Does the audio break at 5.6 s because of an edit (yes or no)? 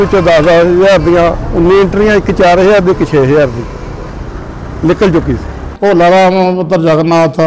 yes